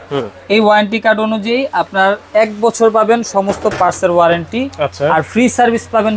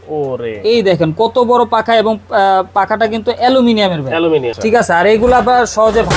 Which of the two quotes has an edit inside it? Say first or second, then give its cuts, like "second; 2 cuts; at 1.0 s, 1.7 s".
second; 1 cut; at 4.5 s